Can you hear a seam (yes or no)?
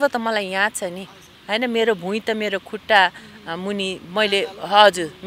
no